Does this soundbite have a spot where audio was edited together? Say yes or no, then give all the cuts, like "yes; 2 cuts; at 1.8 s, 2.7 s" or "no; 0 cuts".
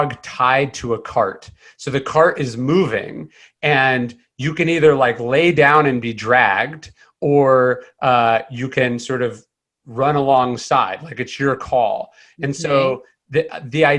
no; 0 cuts